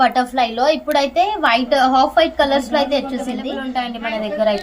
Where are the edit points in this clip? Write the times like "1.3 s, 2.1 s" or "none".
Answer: 3.6 s